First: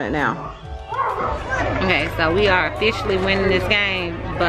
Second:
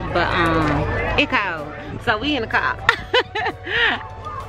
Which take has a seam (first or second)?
first